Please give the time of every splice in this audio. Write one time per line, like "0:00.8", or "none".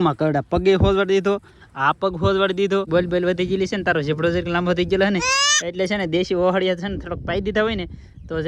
0:02.9